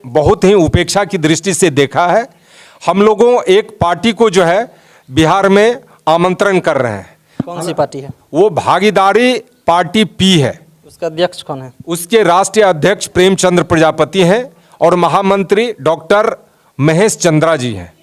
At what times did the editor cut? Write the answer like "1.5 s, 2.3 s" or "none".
none